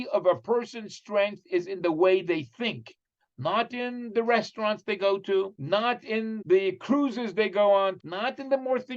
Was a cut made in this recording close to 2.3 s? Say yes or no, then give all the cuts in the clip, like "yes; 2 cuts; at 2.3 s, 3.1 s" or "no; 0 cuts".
no; 2 cuts; at 6.1 s, 8.0 s